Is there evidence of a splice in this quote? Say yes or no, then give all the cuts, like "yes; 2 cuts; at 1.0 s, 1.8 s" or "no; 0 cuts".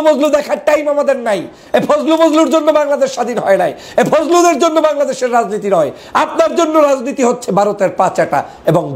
no; 0 cuts